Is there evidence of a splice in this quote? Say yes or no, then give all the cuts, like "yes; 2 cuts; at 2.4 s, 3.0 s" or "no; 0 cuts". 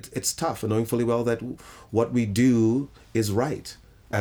no; 0 cuts